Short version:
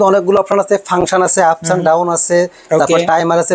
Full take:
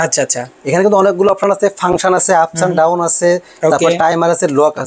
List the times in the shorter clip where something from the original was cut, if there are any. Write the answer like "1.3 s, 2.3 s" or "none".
none